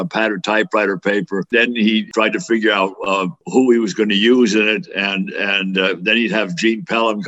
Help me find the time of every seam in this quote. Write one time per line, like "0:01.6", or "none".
0:01.5